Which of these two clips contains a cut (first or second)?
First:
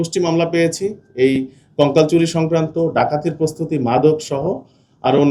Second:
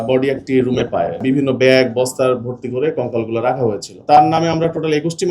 second